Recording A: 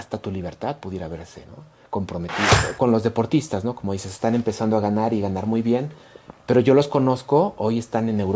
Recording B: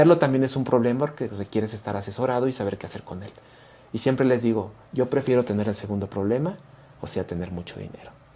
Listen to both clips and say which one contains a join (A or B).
A